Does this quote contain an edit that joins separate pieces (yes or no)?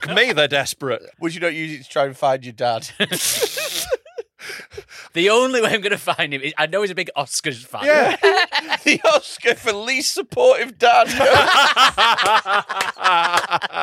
yes